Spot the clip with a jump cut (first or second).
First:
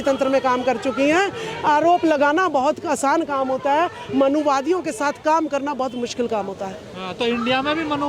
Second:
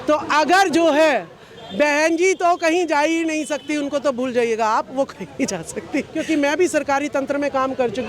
second